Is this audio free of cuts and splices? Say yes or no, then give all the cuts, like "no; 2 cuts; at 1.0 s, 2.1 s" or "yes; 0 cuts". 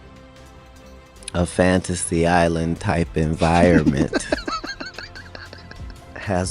no; 1 cut; at 1.3 s